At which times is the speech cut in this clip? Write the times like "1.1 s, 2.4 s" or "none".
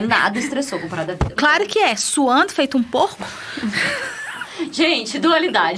1.3 s